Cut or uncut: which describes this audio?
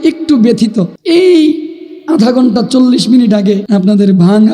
cut